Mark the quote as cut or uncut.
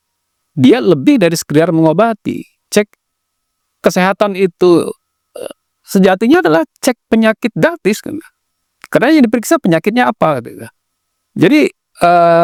uncut